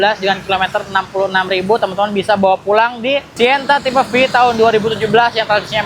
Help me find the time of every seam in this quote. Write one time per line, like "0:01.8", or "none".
0:03.3